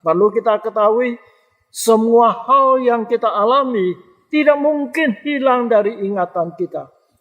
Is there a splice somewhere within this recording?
no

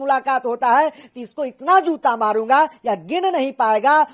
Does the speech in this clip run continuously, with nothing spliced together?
yes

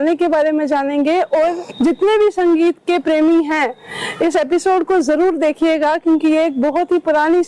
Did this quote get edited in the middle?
no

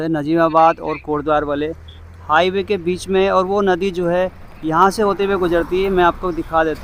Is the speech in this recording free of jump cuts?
yes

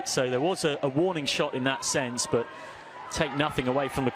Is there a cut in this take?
no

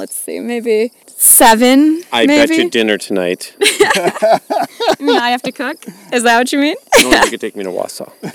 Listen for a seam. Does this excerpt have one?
no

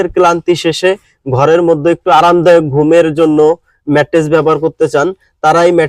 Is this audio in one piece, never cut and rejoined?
yes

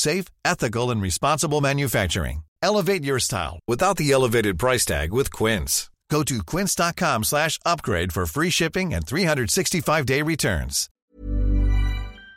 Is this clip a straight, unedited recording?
no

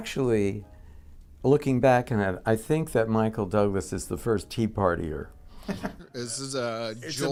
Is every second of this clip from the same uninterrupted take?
yes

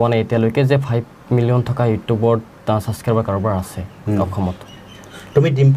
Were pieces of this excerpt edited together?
no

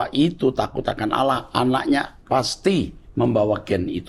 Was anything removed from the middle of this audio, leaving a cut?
no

